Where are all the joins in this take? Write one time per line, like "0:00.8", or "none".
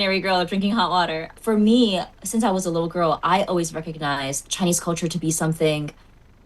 0:01.3